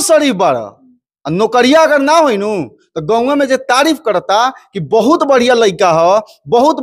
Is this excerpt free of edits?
yes; 0 cuts

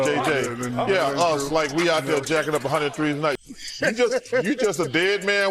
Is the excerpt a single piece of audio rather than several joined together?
no; 1 cut; at 3.4 s

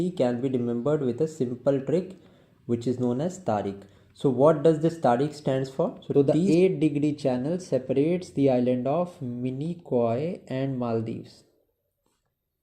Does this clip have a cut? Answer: yes; 1 cut; at 6.0 s

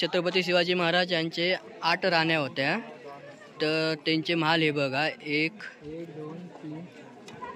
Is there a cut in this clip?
no; 0 cuts

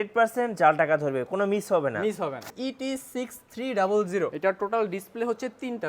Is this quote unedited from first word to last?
no; 2 cuts; at 2.5 s, 4.3 s

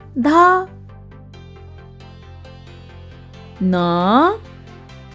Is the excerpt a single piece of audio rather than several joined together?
yes; 0 cuts

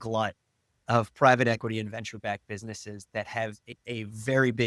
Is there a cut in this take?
yes; 1 cut; at 3.7 s

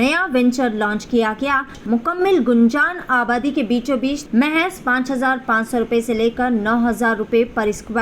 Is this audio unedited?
no; 2 cuts; at 1.8 s, 4.2 s

